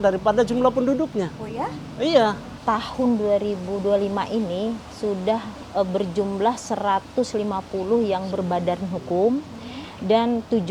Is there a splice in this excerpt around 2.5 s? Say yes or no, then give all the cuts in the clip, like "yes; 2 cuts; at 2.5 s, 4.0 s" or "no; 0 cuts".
yes; 2 cuts; at 2.5 s, 5.6 s